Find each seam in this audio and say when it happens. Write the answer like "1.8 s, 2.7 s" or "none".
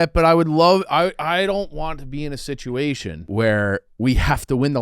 3.1 s, 3.9 s